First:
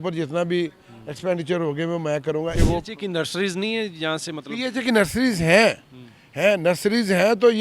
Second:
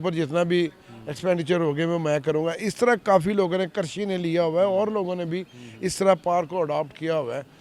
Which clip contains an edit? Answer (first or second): first